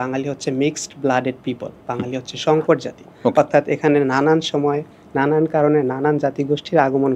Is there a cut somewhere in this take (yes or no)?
no